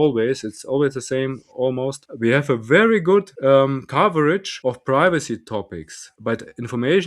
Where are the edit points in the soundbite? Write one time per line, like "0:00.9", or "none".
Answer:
0:02.0
0:03.3
0:04.5
0:06.0